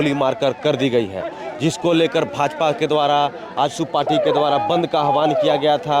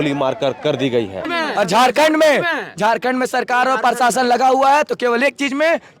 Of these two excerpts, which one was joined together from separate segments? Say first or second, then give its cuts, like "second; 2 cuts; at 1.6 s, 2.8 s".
second; 1 cut; at 1.3 s